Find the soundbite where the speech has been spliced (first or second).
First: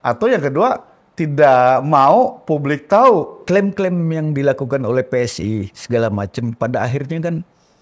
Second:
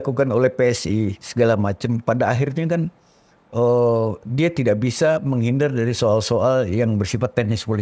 first